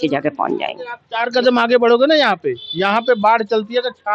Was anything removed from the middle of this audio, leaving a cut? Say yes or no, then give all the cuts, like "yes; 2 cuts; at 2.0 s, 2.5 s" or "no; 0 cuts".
yes; 1 cut; at 1.0 s